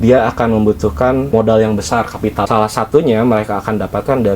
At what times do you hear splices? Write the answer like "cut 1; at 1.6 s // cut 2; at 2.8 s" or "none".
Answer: cut 1; at 1.3 s // cut 2; at 2.5 s